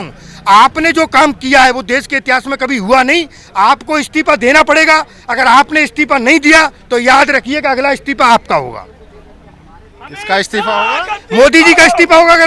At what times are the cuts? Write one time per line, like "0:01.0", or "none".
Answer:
none